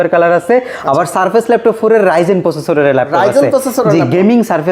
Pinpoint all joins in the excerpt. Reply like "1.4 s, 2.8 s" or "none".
none